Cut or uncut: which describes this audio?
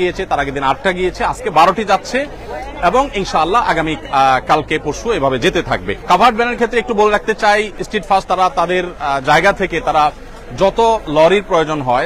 uncut